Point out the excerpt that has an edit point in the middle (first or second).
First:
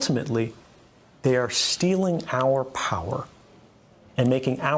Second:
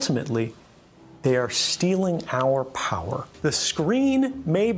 second